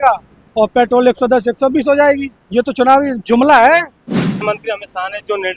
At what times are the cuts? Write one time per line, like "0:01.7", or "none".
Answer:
0:04.4